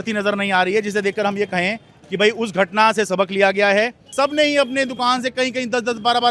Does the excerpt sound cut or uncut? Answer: cut